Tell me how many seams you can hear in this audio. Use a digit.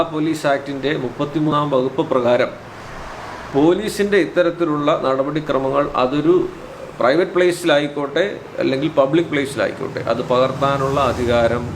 1